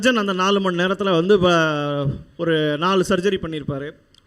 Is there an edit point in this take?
no; 0 cuts

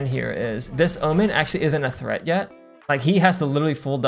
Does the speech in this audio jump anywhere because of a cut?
no; 0 cuts

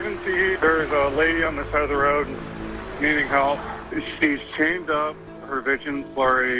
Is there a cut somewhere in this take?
no; 0 cuts

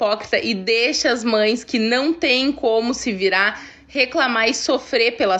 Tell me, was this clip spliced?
no; 0 cuts

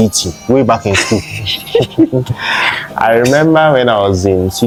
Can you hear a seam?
no; 0 cuts

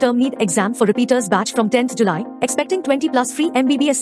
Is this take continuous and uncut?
yes; 0 cuts

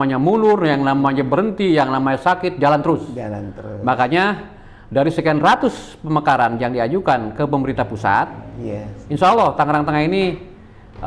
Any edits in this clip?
no; 0 cuts

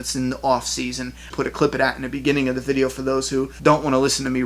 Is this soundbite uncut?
no; 2 cuts; at 1.3 s, 3.5 s

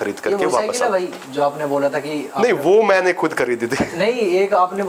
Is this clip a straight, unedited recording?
yes; 0 cuts

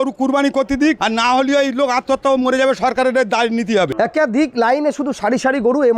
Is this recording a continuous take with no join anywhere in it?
no; 2 cuts; at 1.0 s, 3.9 s

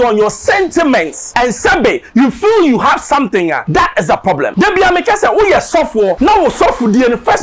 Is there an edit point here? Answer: yes; 4 cuts; at 1.2 s, 3.6 s, 4.5 s, 6.1 s

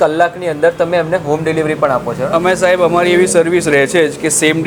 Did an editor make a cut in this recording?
no; 0 cuts

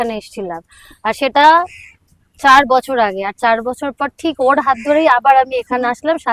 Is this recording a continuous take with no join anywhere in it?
yes; 0 cuts

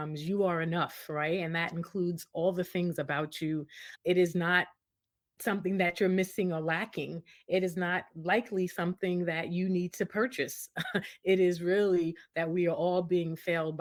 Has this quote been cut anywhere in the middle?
no; 0 cuts

